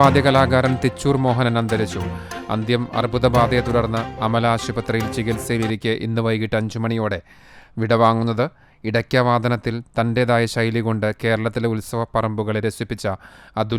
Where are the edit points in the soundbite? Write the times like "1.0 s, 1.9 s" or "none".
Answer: none